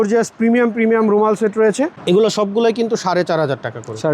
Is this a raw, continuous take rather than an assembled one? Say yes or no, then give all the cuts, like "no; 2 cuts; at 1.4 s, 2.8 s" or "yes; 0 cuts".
no; 1 cut; at 2.0 s